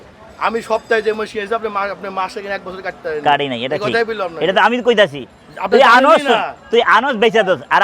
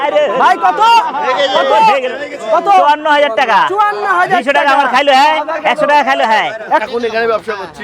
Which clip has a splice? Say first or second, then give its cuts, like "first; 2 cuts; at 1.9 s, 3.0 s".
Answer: second; 1 cut; at 6.8 s